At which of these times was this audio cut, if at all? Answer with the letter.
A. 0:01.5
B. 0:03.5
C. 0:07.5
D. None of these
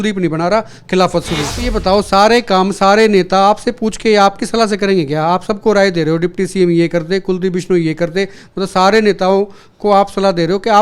A